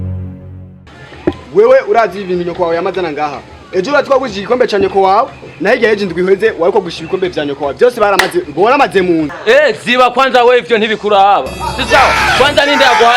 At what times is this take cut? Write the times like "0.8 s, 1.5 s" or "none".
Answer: none